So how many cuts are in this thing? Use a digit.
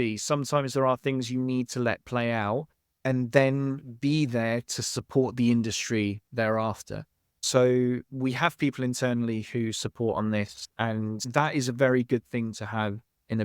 1